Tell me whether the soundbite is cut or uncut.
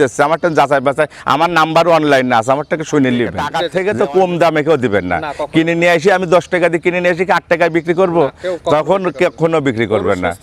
cut